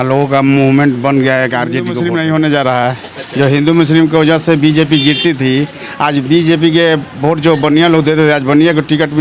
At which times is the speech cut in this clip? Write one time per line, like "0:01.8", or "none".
0:01.9